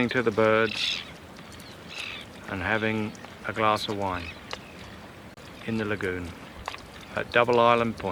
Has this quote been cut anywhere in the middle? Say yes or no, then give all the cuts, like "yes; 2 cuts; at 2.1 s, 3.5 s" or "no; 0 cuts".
yes; 1 cut; at 5.4 s